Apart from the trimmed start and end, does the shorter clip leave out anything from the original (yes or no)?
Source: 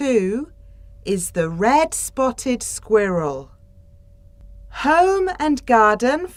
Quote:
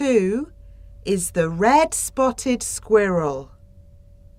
no